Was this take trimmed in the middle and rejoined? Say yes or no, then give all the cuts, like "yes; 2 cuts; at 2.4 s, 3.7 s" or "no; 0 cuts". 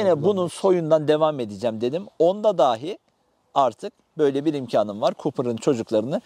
no; 0 cuts